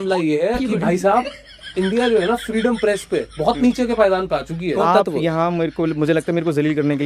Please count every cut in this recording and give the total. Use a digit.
1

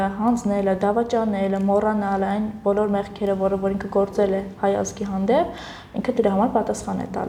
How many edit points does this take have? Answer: 0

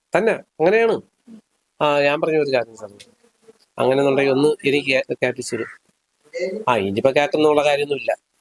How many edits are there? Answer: 0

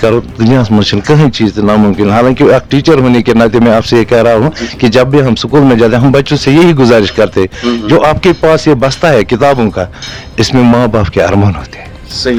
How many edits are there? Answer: 0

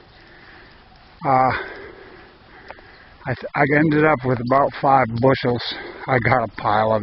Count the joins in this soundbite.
1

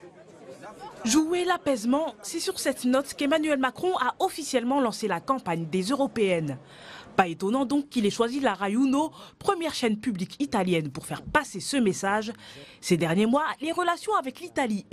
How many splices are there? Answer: 0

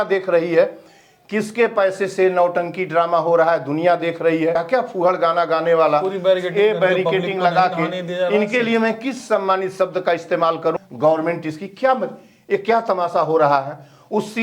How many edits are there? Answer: 2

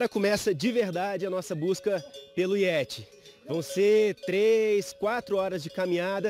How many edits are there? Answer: 0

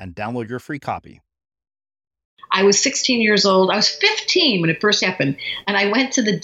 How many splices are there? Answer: 1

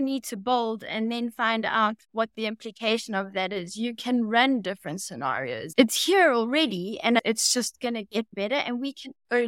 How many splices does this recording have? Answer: 2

